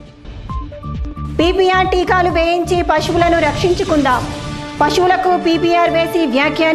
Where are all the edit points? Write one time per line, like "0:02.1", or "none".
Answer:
0:01.2